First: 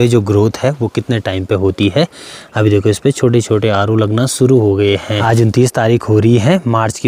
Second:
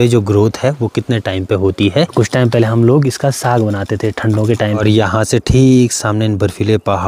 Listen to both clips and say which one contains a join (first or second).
second